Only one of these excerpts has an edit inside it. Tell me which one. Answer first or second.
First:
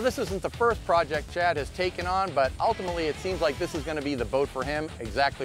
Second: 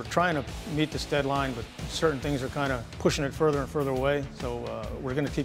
second